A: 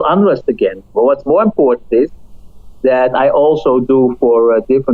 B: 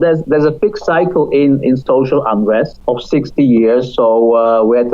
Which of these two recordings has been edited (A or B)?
B